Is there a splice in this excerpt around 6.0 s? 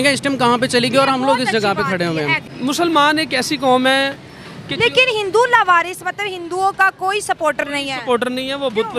no; 1 cut; at 2.5 s

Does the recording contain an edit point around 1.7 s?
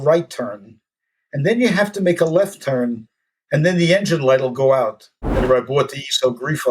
no; 1 cut; at 5.4 s

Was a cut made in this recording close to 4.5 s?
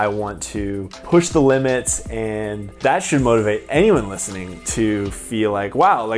no; 2 cuts; at 1.0 s, 2.7 s

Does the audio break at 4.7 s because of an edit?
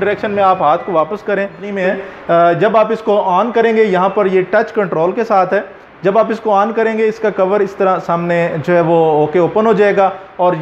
no; 1 cut; at 1.7 s

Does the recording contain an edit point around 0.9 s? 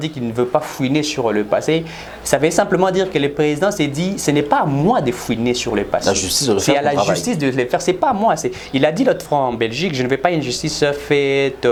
no; 0 cuts

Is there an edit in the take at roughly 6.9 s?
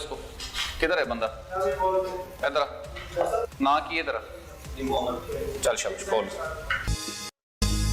yes; 1 cut; at 6.9 s

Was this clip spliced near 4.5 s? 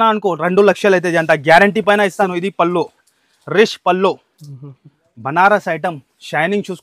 no; 1 cut; at 2.3 s

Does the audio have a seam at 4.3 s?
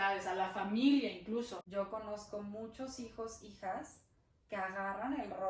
no; 1 cut; at 1.6 s

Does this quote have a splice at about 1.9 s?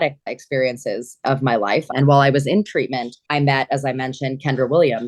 yes; 1 cut; at 1.9 s

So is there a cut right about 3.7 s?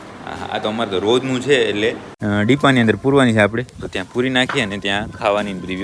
no; 1 cut; at 2.1 s

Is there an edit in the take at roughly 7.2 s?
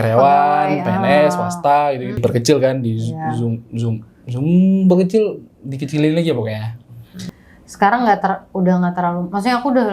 yes; 2 cuts; at 2.2 s, 7.2 s

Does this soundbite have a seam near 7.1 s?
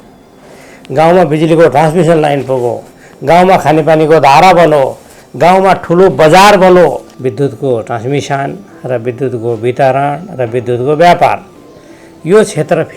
yes; 1 cut; at 7.1 s

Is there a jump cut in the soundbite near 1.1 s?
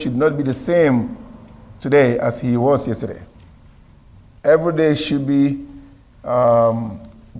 no; 0 cuts

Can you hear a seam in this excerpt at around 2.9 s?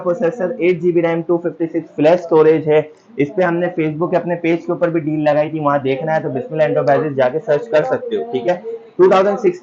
no; 0 cuts

